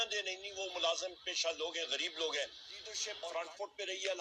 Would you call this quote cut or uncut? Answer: cut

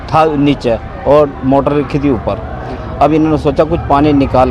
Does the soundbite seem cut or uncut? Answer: uncut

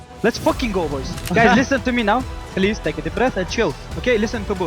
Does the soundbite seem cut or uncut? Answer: cut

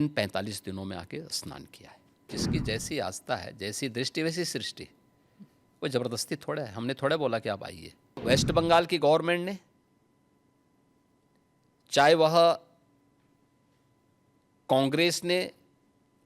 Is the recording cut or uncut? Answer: cut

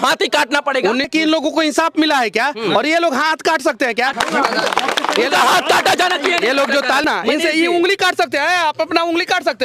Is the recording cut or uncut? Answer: cut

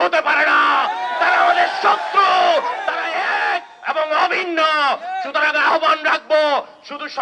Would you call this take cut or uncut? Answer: uncut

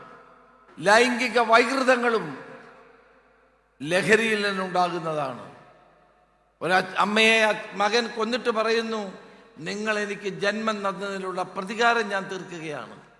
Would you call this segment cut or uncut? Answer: uncut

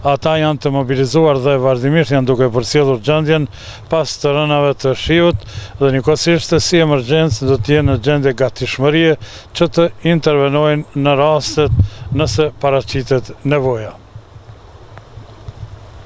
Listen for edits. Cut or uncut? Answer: uncut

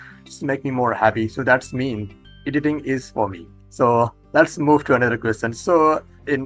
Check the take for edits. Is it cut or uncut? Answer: uncut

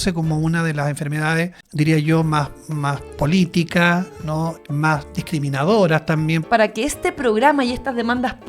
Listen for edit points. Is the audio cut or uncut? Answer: cut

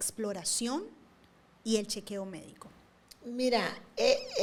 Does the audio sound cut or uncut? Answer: uncut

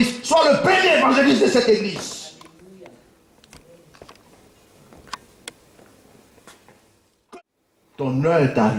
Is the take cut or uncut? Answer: cut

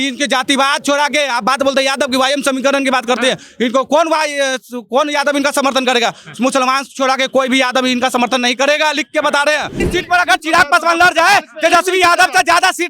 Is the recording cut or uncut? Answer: cut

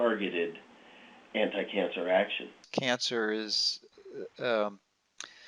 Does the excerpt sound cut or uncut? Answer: cut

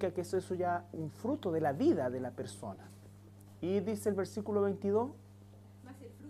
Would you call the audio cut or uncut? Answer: uncut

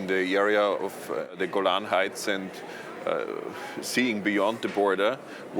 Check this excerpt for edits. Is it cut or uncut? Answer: cut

